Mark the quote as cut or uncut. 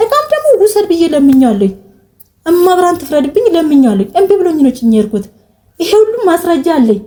uncut